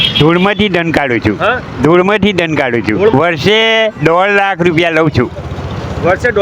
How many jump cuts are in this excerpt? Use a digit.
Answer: 1